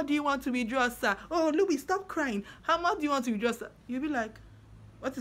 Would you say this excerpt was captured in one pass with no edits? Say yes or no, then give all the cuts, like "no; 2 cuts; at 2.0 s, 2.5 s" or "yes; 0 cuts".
yes; 0 cuts